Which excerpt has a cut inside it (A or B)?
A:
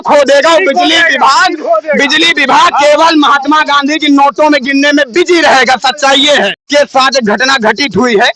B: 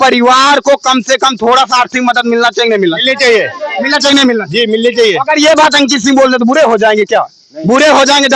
A